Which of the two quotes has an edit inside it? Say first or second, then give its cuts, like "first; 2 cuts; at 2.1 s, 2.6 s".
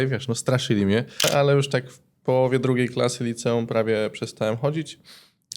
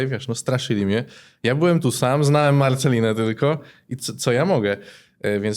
first; 1 cut; at 1.3 s